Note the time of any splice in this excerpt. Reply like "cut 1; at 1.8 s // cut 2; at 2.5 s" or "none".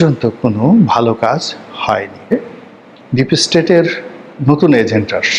cut 1; at 2.3 s